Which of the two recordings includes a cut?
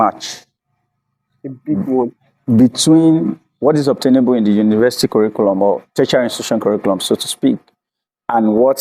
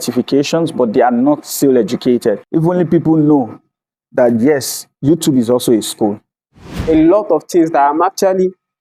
second; 2 cuts; at 2.4 s, 6.6 s

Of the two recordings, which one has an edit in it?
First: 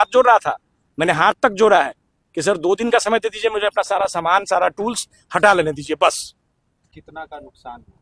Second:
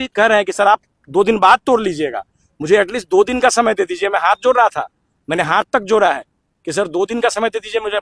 first; 1 cut; at 6.9 s

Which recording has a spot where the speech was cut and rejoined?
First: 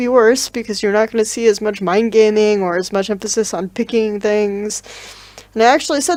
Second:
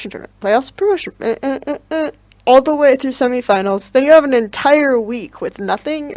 second; 1 cut; at 2.0 s

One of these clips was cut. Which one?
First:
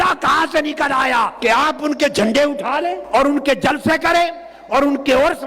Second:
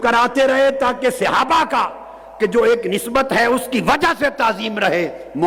first; 2 cuts; at 1.3 s, 3.0 s

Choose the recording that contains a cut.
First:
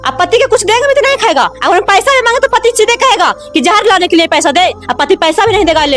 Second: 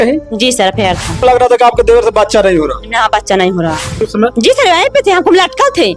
second; 2 cuts; at 1.2 s, 4.0 s

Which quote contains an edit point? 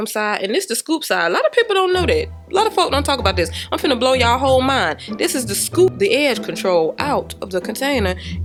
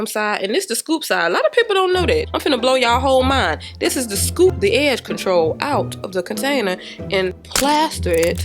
second; 2 cuts; at 2.3 s, 7.4 s

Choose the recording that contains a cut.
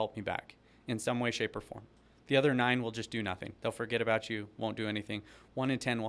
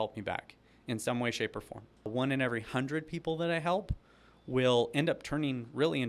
second; 1 cut; at 2.1 s

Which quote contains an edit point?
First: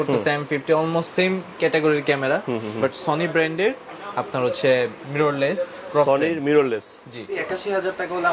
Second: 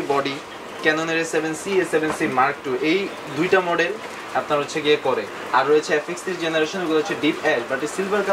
first; 1 cut; at 7.3 s

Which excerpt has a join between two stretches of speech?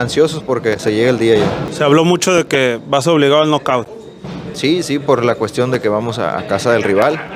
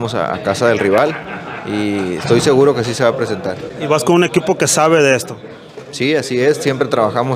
first; 1 cut; at 1.6 s

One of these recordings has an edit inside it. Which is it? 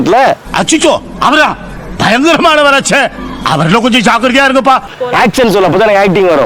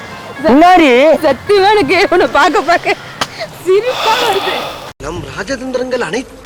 first; 1 cut; at 4.9 s

